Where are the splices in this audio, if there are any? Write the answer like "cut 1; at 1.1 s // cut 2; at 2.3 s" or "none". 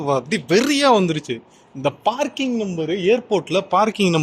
none